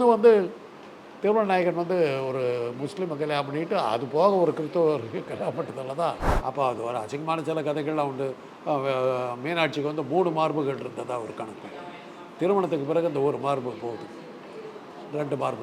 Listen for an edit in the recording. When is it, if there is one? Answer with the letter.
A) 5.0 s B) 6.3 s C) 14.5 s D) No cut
B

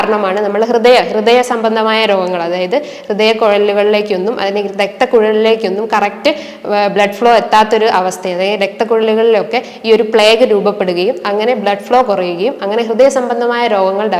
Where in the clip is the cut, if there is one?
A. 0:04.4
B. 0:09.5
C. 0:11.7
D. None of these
D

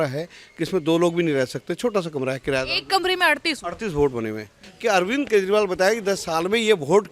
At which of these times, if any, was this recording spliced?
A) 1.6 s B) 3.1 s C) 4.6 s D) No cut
C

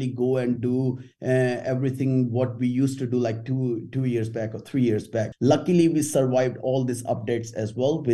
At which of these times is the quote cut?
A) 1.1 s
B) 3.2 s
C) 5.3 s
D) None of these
C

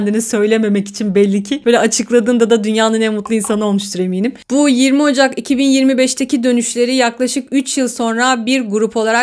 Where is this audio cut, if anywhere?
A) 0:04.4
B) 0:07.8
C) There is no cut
C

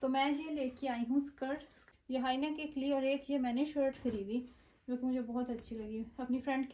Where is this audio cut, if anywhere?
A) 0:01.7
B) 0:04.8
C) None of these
A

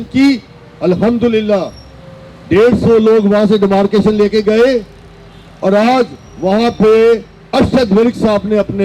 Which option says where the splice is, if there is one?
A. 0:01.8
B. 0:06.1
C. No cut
C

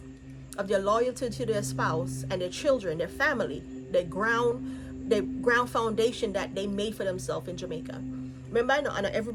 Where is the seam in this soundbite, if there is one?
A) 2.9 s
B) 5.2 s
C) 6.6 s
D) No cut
D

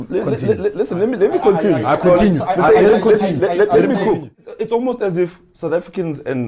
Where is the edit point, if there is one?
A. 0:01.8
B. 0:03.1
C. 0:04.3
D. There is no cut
C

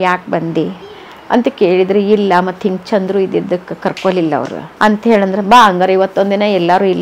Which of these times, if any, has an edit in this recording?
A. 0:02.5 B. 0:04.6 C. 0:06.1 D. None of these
B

